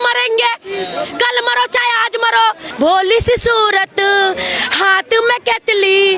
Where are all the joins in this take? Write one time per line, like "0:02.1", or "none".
0:02.6